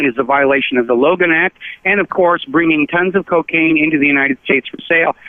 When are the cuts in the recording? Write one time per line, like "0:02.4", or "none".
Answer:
0:03.5